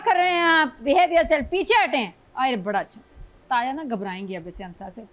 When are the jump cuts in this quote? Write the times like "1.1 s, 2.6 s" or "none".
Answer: 3.3 s